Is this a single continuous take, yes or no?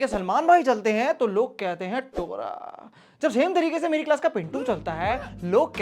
yes